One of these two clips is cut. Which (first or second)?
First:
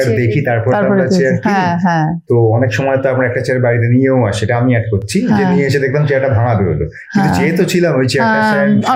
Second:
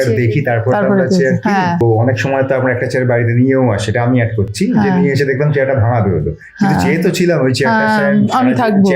second